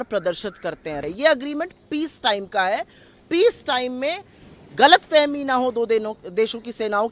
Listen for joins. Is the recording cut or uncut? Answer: cut